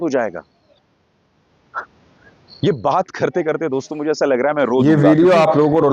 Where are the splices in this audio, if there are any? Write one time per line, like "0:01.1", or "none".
0:04.8